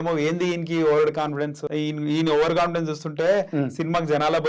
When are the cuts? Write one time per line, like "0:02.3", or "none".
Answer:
0:01.6